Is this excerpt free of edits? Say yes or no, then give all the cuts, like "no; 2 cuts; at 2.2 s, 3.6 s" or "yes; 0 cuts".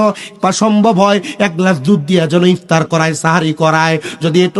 yes; 0 cuts